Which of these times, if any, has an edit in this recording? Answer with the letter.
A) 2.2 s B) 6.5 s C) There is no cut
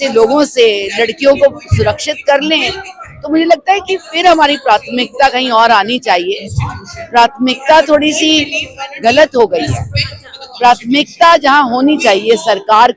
C